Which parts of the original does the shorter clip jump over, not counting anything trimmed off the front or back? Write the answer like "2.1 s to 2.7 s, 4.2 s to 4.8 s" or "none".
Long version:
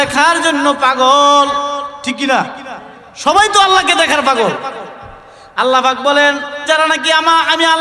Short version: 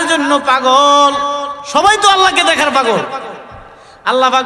1.9 s to 3.0 s